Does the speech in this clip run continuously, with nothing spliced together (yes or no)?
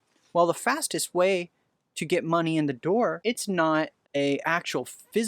no